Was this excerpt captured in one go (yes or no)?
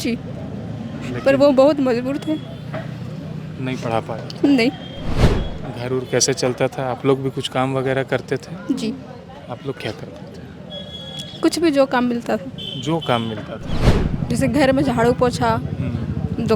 no